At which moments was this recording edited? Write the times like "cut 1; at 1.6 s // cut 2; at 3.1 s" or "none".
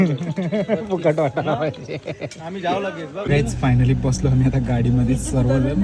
cut 1; at 3.3 s